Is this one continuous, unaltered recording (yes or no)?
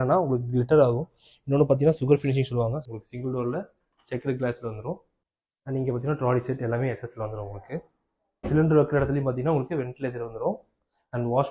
no